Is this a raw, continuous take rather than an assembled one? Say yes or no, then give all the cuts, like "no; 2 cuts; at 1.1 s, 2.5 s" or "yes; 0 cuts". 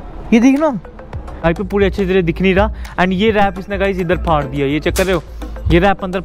no; 1 cut; at 1.4 s